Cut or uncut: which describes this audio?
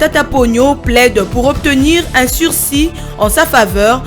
uncut